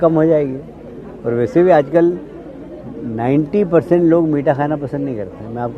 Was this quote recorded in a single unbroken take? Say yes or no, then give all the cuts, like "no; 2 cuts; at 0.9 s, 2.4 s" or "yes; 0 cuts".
yes; 0 cuts